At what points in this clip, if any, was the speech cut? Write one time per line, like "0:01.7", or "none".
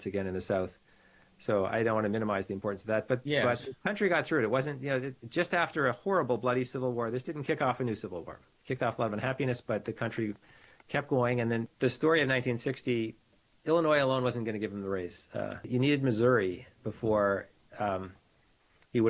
0:11.7
0:13.4
0:15.6